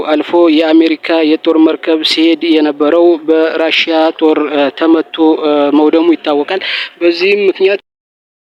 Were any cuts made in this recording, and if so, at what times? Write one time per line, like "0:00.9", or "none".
none